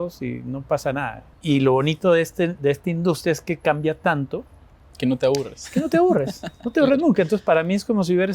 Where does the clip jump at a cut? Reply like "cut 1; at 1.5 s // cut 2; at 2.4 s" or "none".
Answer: cut 1; at 1.2 s